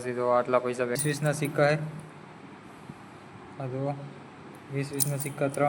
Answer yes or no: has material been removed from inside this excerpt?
yes